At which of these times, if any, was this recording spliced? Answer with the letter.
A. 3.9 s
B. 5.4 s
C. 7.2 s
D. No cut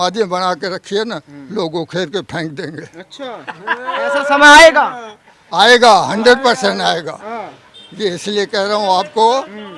D